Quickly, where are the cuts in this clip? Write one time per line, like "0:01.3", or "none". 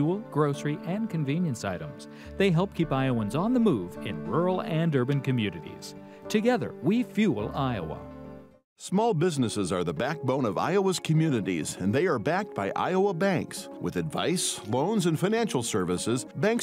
none